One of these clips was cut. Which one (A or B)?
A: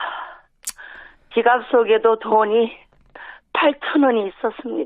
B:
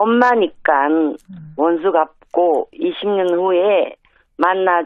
B